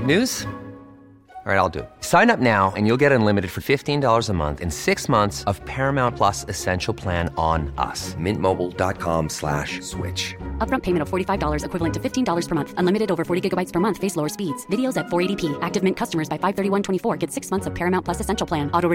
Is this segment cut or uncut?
uncut